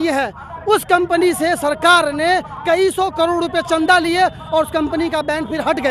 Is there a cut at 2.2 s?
no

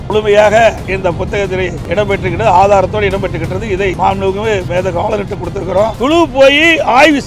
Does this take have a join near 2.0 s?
no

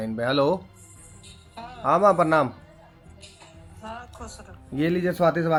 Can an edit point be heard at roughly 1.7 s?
no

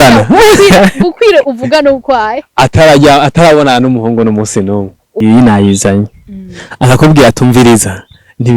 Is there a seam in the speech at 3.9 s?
no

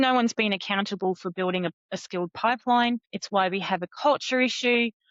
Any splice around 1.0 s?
no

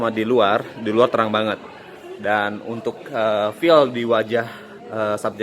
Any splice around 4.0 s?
no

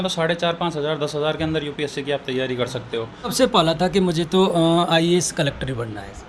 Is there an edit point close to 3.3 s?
yes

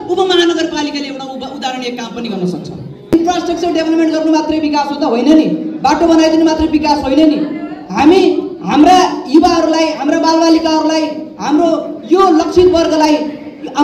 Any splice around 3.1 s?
yes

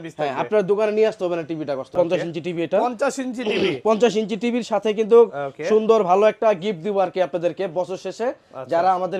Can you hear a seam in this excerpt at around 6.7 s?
no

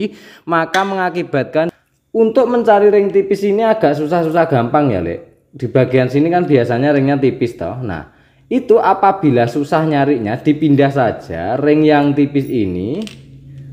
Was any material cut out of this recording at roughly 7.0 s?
no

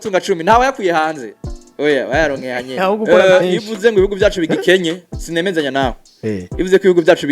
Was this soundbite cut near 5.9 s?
no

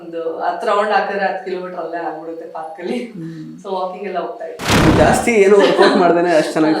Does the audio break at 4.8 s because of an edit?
yes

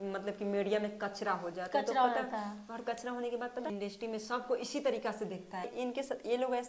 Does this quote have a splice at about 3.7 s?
yes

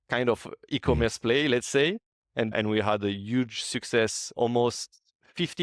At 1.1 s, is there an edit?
no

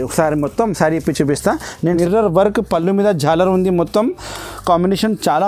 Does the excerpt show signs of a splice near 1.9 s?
yes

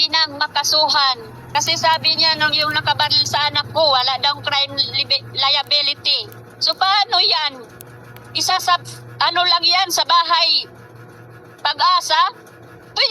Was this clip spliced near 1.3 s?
yes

